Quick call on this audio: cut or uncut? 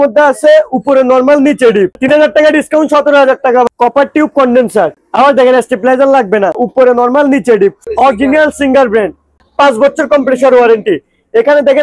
cut